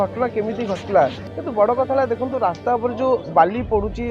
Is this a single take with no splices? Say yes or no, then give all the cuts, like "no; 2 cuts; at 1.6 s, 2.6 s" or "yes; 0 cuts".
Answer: no; 1 cut; at 1.3 s